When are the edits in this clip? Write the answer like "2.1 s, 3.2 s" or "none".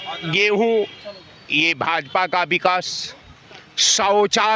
none